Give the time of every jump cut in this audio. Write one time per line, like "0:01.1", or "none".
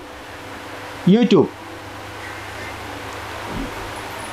none